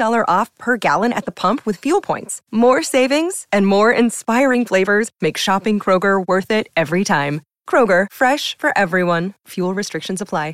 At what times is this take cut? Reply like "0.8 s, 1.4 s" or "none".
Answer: none